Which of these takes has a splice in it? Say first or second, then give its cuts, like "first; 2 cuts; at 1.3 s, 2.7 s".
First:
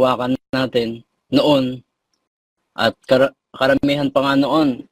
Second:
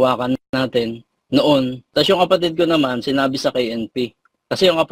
second; 1 cut; at 1.8 s